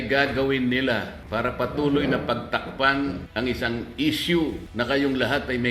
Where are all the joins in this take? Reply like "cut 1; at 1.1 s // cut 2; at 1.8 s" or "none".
cut 1; at 1.2 s // cut 2; at 3.2 s // cut 3; at 4.6 s